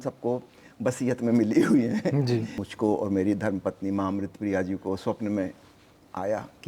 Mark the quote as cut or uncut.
cut